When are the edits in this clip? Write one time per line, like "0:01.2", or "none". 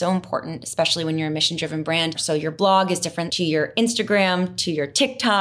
0:02.2
0:03.2